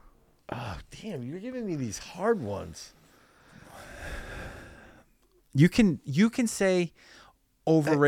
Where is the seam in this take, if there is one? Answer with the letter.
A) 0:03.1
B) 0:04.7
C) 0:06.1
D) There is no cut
D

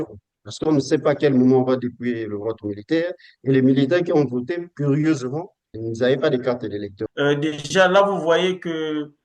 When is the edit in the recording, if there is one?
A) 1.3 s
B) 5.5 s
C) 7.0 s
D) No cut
C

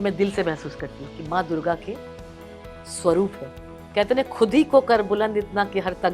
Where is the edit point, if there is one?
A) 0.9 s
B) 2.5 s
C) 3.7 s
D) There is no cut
C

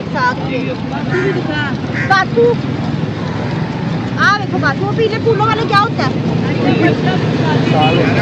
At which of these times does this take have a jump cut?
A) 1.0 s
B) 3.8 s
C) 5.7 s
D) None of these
D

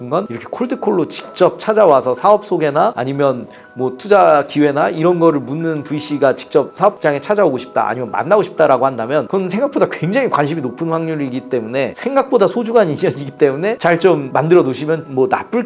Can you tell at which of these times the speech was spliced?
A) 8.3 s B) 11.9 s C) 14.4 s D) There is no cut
B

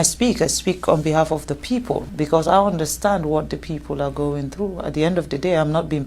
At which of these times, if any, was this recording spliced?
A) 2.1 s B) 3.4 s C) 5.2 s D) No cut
A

